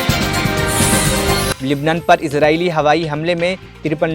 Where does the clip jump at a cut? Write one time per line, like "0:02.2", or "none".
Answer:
0:01.5

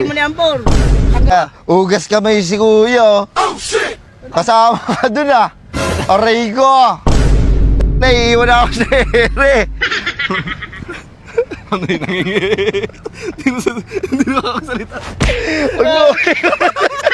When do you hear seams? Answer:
0:01.3

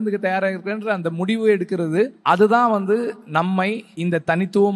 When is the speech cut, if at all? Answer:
0:02.2
0:03.6

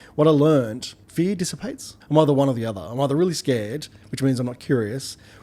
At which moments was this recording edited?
0:01.0
0:01.9

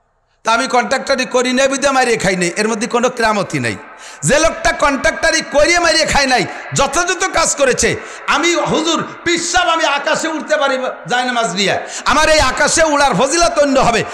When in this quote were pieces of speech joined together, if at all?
none

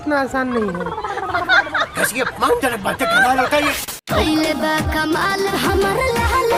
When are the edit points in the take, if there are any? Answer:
0:03.8

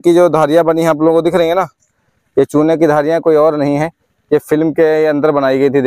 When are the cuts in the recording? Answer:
none

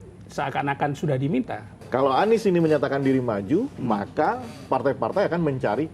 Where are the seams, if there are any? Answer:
0:01.8

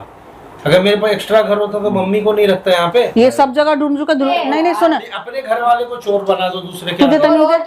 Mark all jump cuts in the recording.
0:04.3

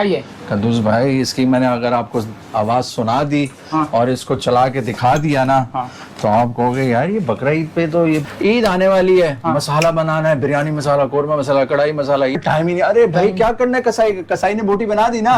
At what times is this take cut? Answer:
0:08.2
0:12.4

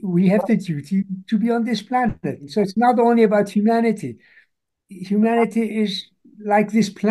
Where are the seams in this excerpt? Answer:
0:02.4

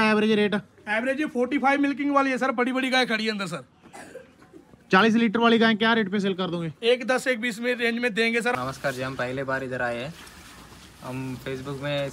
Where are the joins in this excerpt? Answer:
0:08.5

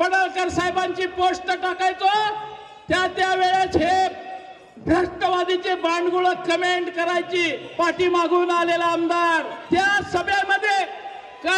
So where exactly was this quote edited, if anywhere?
0:07.6
0:09.5

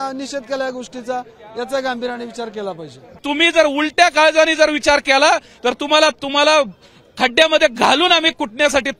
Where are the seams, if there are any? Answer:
0:03.2

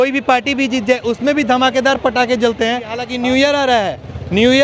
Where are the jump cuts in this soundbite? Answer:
0:03.1

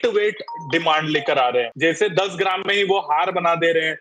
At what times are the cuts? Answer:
0:01.7

